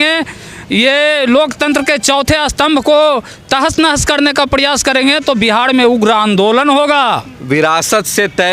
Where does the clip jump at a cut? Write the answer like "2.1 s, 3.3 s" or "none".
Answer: 7.3 s